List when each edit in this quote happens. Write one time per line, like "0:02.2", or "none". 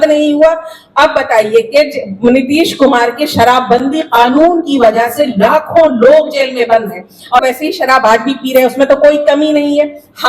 0:07.4

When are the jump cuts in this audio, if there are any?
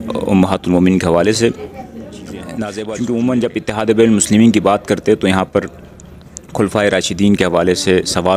0:02.8

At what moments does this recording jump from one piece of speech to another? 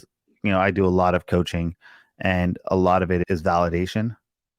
0:03.2

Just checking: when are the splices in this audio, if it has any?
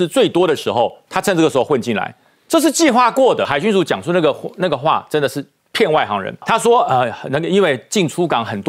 0:03.5
0:06.4

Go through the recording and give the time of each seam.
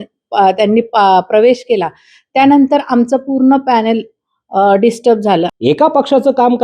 0:05.5

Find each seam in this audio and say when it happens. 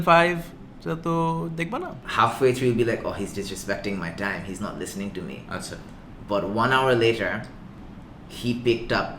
0:02.0

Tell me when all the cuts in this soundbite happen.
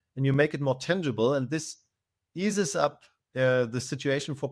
none

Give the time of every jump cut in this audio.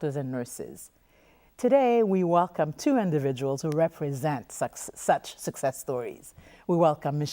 0:05.7

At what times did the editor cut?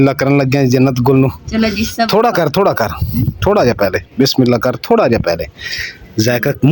none

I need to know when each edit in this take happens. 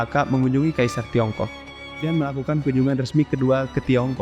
0:02.0

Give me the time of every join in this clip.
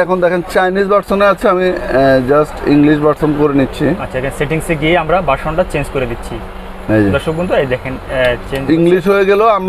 none

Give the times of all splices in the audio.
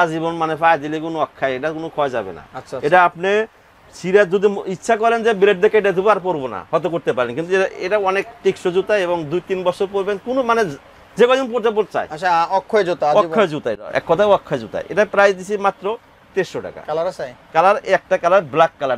none

